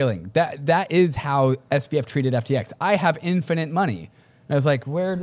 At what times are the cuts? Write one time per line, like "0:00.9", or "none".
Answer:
none